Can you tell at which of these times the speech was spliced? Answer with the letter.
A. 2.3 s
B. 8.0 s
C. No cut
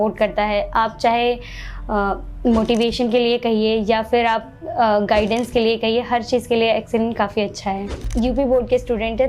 B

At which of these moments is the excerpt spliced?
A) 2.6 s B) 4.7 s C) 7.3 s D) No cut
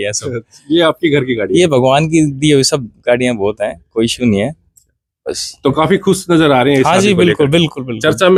D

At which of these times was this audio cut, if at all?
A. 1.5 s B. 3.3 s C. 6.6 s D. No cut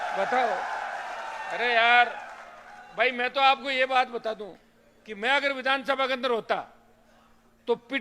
D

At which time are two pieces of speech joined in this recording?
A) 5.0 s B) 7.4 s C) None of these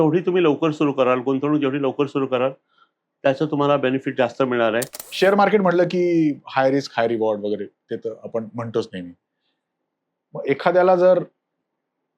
A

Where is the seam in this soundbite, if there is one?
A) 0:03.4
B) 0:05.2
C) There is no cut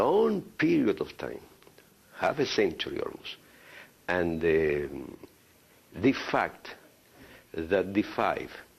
C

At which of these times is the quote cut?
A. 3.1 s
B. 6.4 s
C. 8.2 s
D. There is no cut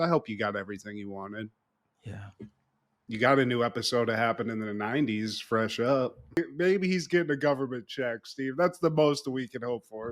B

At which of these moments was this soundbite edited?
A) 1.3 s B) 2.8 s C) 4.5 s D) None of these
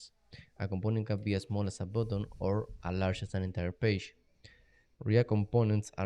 B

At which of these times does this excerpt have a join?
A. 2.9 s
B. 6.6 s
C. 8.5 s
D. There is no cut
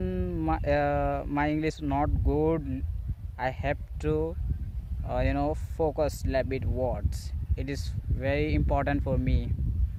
D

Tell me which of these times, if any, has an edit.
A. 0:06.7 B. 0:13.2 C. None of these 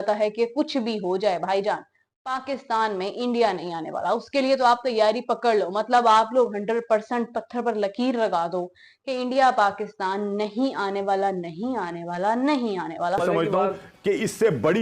B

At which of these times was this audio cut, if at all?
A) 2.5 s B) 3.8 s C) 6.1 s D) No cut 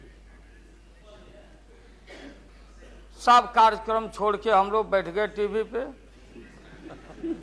A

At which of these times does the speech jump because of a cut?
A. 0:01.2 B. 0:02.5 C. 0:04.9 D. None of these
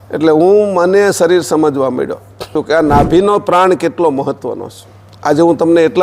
B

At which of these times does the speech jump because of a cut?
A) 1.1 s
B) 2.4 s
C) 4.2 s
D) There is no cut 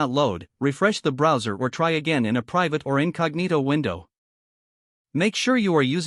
D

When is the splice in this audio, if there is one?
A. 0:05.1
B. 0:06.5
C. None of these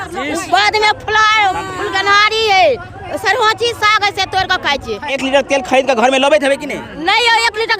A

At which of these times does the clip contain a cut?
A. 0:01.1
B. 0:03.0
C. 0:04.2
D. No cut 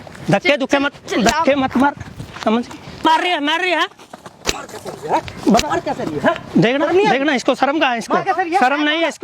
B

